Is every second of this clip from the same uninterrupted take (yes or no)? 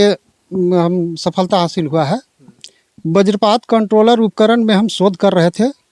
yes